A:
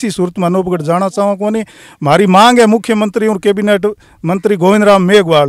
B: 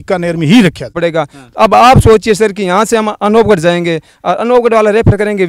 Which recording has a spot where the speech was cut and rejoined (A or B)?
B